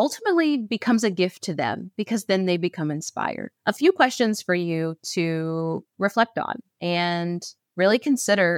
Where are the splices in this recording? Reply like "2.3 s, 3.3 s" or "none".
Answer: 3.5 s, 6.6 s, 7.6 s